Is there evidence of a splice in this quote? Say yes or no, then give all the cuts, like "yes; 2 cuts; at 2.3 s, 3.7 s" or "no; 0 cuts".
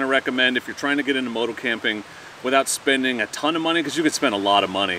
no; 0 cuts